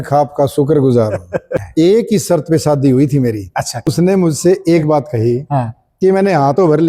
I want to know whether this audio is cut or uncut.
cut